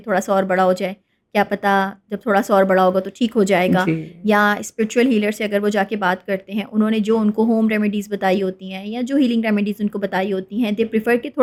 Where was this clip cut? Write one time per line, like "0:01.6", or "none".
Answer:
none